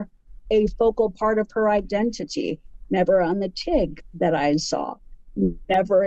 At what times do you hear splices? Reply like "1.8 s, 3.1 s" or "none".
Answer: none